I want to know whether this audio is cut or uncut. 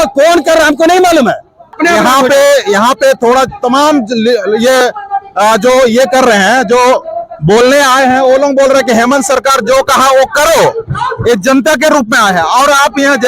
cut